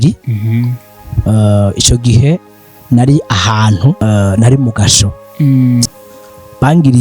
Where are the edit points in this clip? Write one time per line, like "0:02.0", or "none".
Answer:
0:04.0
0:05.8